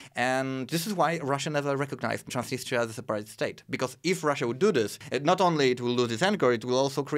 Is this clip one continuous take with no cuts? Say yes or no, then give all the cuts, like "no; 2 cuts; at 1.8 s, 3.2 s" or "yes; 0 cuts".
no; 2 cuts; at 2.3 s, 5.0 s